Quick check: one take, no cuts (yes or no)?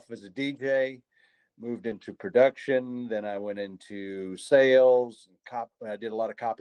yes